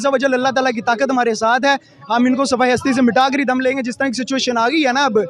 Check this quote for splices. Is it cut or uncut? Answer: uncut